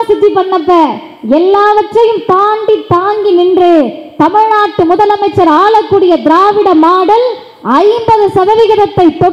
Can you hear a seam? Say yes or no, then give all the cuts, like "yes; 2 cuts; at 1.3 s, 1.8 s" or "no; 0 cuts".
no; 0 cuts